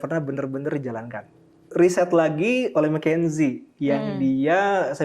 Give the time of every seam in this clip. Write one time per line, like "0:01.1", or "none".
0:01.7